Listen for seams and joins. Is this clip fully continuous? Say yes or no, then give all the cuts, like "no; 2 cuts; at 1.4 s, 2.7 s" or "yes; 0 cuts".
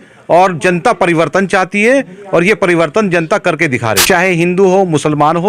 no; 1 cut; at 4.0 s